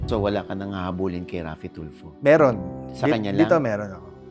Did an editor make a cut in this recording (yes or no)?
no